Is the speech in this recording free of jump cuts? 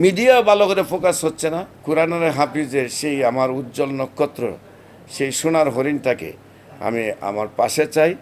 no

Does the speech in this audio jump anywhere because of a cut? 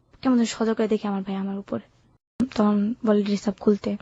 yes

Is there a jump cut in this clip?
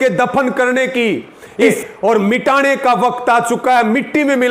yes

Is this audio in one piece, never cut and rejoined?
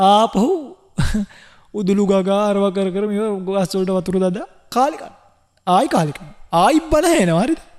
yes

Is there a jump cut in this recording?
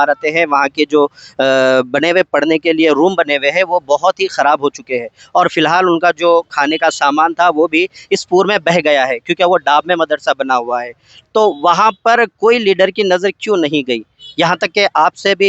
no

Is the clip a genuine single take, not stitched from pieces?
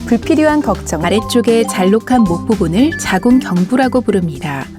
yes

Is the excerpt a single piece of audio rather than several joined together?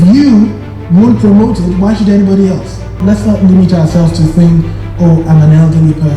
no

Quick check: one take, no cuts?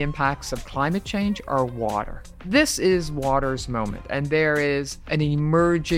no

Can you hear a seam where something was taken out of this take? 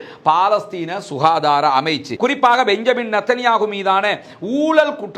yes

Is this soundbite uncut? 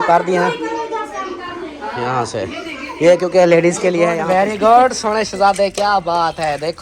no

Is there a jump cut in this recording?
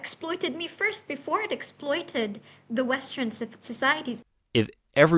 yes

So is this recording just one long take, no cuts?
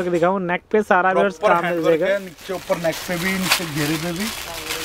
yes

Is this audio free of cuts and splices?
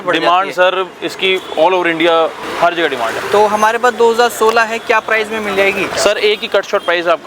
yes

